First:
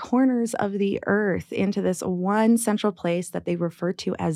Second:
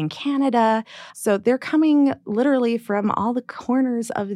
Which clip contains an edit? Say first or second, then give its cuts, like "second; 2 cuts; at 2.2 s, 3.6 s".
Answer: second; 1 cut; at 1.0 s